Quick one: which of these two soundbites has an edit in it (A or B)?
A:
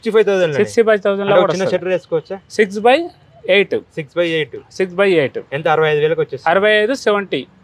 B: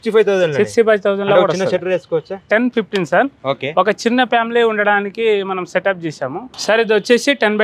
B